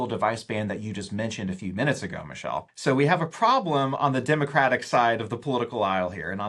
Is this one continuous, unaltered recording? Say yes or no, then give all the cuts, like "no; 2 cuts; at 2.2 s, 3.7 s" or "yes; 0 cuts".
no; 1 cut; at 2.7 s